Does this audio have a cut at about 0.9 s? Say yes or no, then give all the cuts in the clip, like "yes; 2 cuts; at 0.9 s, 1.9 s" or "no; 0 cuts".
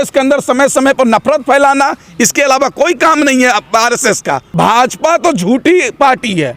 no; 1 cut; at 4.4 s